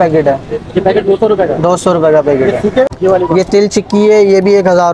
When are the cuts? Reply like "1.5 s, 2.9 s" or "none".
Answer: 2.9 s